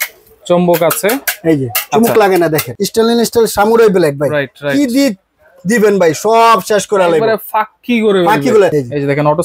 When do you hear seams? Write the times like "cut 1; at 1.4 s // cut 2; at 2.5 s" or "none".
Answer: cut 1; at 2.7 s // cut 2; at 8.7 s